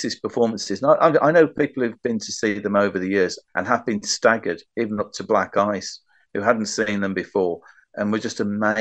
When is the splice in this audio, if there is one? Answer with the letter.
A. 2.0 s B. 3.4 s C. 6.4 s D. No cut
B